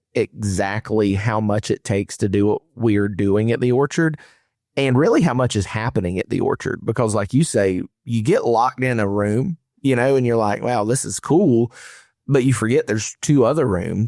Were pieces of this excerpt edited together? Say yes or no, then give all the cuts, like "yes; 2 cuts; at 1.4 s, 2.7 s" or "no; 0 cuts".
no; 0 cuts